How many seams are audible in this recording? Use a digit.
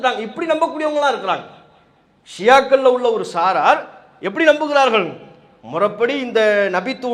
0